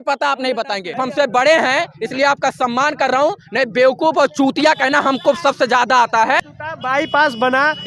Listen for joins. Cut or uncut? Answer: cut